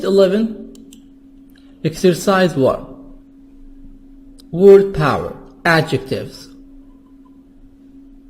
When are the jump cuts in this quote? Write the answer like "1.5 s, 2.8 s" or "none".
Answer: 4.8 s

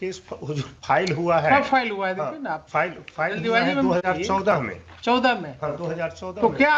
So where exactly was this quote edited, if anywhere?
none

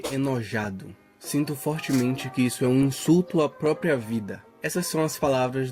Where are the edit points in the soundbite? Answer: 4.6 s

